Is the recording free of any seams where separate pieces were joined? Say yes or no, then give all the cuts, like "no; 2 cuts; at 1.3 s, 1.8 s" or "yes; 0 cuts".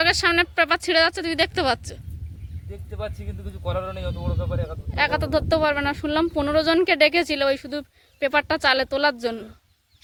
yes; 0 cuts